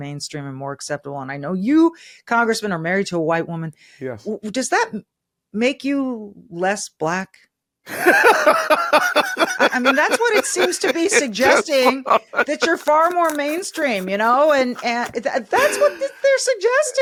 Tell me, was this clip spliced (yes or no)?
no